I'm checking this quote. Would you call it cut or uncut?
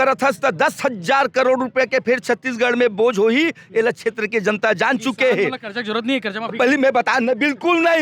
uncut